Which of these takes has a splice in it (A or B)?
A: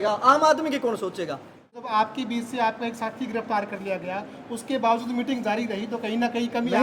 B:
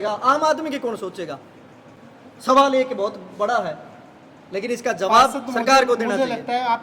A